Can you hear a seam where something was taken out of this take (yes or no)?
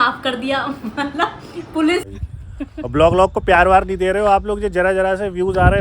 yes